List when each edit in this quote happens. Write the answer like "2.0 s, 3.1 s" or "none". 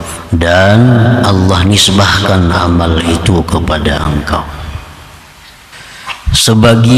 5.7 s